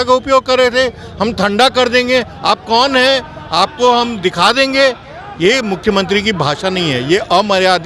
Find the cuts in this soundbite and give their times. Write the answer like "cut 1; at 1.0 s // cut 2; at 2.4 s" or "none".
none